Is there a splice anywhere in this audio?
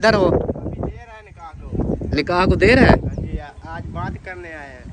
no; 0 cuts

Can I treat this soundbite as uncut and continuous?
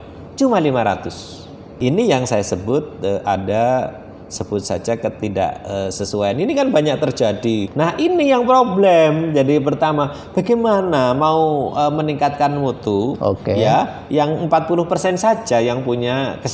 no; 2 cuts; at 1.8 s, 7.7 s

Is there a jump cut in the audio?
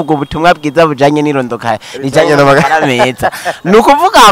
no; 0 cuts

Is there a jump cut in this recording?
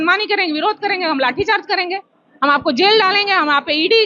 no; 0 cuts

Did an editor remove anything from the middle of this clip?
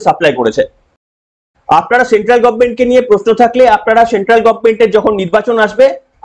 yes; 1 cut; at 1.5 s

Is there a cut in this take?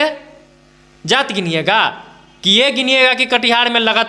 no; 0 cuts

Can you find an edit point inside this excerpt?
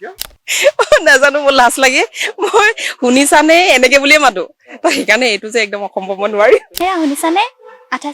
yes; 1 cut; at 6.7 s

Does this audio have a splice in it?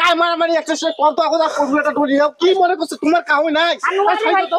no; 0 cuts

